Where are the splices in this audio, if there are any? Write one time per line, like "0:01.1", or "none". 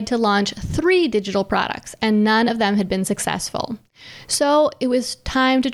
none